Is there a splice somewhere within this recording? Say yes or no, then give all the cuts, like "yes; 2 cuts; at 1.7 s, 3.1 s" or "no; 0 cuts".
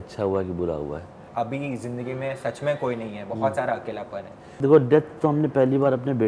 yes; 2 cuts; at 1.2 s, 4.5 s